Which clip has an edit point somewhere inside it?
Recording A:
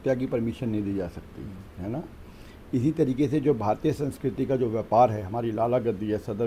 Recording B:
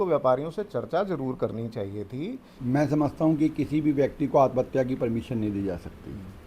B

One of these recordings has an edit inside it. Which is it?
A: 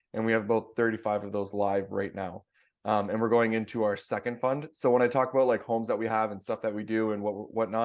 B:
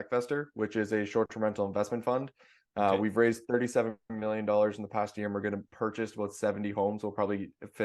B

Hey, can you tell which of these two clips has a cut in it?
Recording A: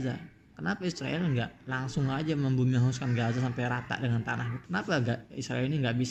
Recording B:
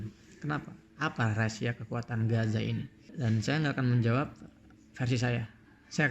B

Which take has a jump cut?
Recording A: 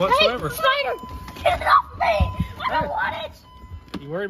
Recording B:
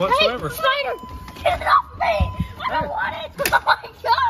B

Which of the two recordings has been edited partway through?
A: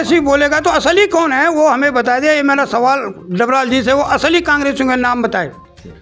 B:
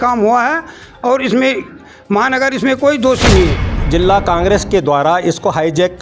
B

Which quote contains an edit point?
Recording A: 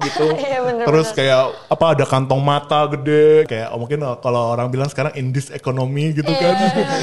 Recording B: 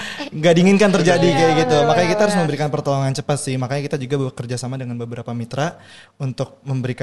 A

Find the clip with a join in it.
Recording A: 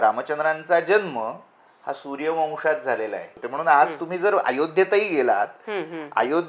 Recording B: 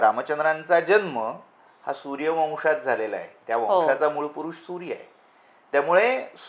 A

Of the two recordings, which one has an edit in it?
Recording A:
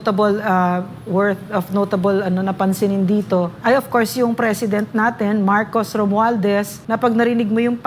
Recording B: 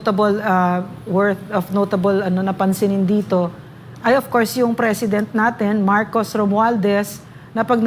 A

